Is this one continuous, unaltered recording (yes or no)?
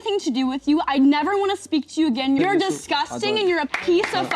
no